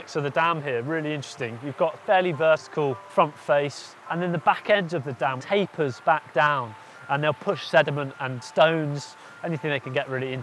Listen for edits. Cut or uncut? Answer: cut